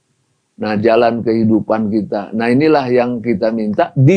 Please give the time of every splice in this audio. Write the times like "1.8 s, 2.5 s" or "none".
none